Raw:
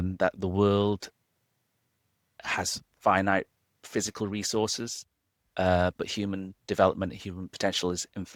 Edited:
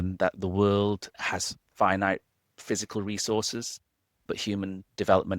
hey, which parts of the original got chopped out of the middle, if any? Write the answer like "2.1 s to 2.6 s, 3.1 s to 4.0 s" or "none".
1.1 s to 2.4 s, 5.5 s to 6.0 s